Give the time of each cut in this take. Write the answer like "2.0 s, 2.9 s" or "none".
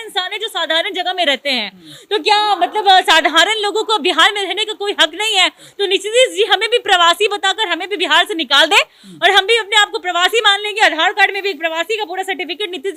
none